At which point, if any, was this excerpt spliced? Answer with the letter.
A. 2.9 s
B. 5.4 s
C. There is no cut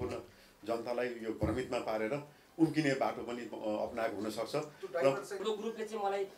B